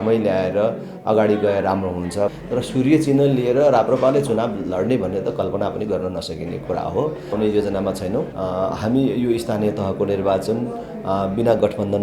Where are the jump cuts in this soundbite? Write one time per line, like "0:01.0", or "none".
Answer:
0:02.4
0:07.3
0:08.3